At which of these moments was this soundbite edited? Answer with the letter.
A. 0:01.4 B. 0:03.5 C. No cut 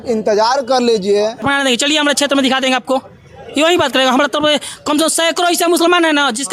A